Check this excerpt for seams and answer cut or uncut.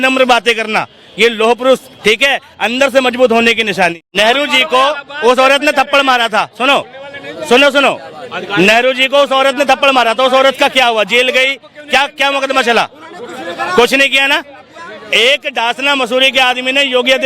cut